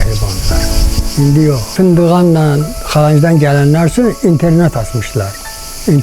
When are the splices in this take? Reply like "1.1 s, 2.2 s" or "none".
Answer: 1.7 s